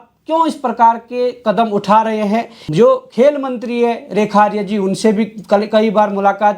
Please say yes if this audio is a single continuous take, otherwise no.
no